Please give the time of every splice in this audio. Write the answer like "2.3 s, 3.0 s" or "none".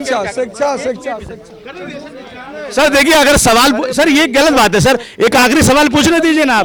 none